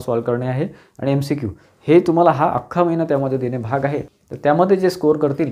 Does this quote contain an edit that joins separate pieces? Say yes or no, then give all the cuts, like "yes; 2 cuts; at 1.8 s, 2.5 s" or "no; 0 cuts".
yes; 1 cut; at 4.2 s